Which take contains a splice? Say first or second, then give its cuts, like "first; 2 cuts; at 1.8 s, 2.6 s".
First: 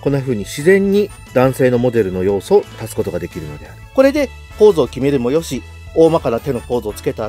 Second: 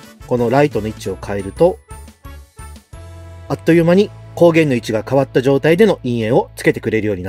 first; 3 cuts; at 1.2 s, 2.8 s, 3.8 s